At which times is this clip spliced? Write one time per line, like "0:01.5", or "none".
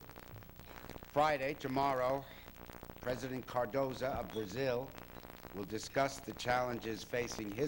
0:01.2